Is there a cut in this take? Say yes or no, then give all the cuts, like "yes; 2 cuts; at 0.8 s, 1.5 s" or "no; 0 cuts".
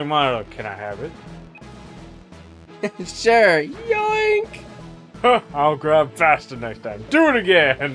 no; 0 cuts